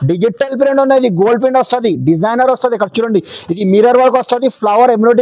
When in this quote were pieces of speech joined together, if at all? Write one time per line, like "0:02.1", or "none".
none